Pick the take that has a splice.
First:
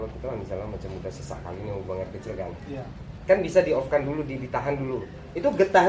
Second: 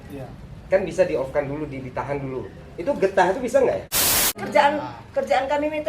second; 1 cut; at 4.3 s

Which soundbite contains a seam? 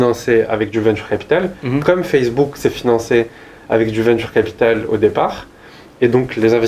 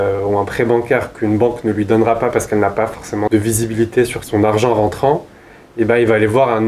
second; 2 cuts; at 3.3 s, 4.2 s

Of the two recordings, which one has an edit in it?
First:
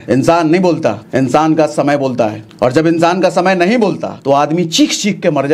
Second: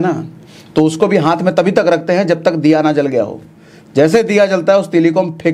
first; 3 cuts; at 1.0 s, 2.4 s, 4.1 s

